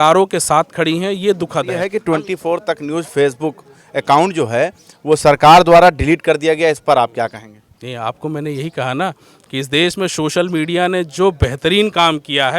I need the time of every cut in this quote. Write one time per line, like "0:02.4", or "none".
0:01.8